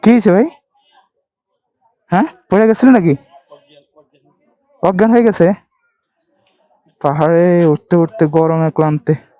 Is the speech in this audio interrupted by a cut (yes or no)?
no